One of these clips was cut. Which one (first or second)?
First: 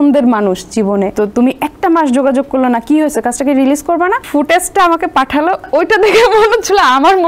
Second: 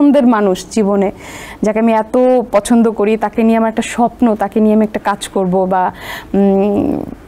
first